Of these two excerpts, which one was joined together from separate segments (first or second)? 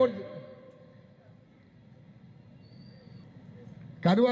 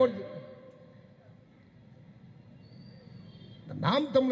first